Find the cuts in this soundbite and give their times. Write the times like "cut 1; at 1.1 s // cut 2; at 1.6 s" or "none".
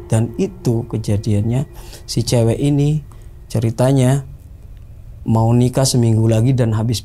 none